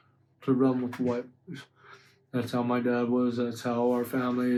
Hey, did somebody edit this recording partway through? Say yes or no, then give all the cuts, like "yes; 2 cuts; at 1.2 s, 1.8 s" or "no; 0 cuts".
no; 0 cuts